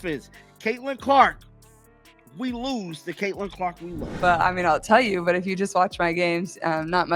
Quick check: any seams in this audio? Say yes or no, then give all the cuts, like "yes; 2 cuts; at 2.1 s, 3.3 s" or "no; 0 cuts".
yes; 1 cut; at 4.1 s